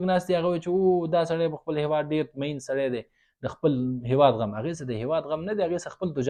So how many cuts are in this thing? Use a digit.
0